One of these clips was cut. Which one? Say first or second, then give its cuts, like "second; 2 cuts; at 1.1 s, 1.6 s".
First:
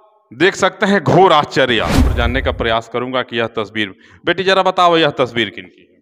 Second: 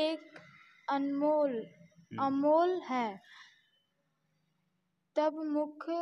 first; 1 cut; at 2.1 s